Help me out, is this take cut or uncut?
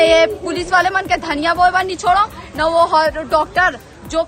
uncut